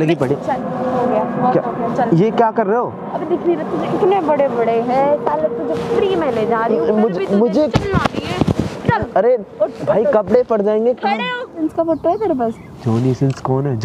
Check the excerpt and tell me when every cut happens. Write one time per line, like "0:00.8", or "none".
0:11.7